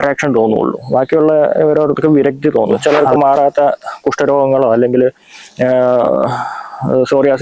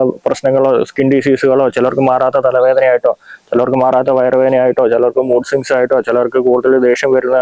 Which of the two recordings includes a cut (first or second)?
first